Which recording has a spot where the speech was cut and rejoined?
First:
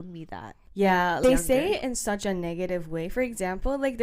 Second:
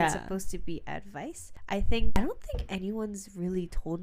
first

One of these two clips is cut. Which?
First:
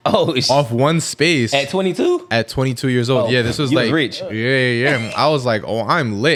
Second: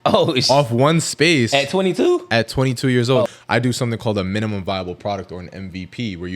second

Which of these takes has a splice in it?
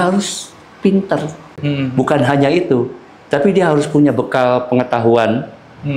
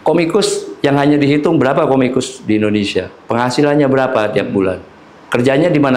first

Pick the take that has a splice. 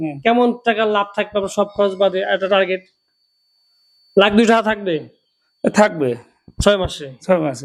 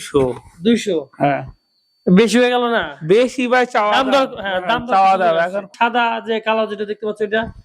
second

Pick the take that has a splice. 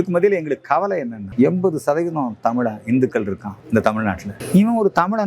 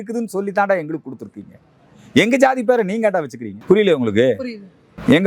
first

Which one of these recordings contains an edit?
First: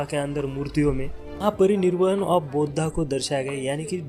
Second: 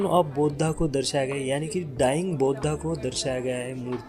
first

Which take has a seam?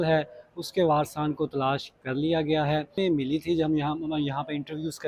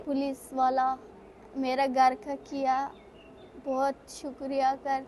first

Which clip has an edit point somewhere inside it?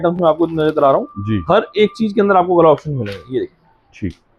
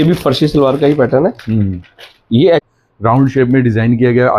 second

